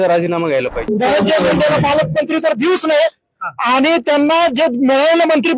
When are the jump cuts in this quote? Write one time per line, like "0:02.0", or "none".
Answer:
0:00.9